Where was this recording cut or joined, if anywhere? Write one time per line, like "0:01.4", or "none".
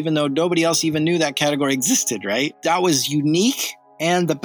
0:02.5